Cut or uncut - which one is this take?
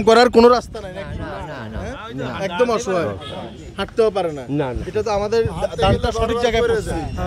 uncut